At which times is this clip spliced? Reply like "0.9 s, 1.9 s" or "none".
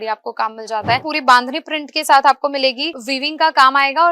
1.0 s